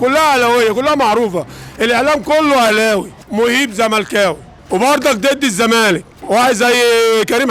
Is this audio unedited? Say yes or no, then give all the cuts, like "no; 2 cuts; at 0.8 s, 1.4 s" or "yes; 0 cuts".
no; 3 cuts; at 3.2 s, 4.5 s, 6.1 s